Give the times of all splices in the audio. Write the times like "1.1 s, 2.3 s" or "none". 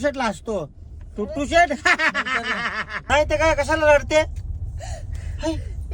3.0 s